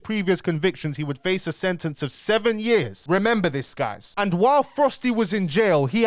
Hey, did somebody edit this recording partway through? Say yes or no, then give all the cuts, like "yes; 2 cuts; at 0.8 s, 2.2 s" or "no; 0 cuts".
yes; 2 cuts; at 3.0 s, 4.0 s